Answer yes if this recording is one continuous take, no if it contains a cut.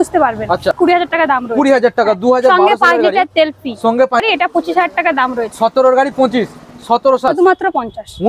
no